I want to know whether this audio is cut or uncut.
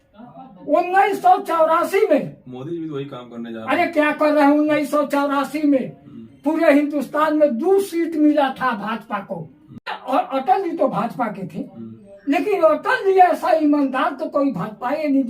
cut